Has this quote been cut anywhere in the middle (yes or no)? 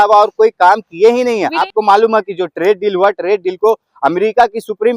yes